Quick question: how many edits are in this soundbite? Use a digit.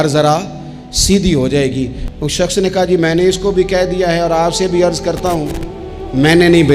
1